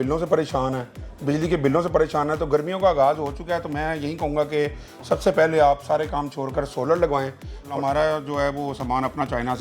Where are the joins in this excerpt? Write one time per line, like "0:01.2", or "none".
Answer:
0:07.6